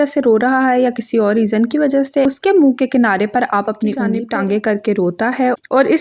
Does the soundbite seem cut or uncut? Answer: cut